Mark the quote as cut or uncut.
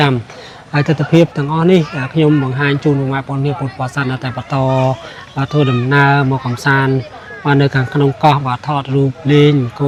uncut